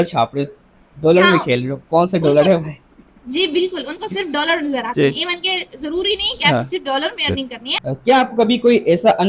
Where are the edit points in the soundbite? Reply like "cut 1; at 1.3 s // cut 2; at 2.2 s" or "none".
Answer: cut 1; at 7.6 s